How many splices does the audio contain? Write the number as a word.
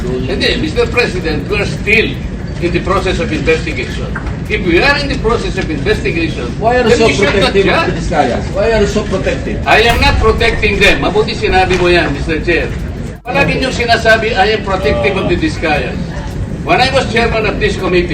one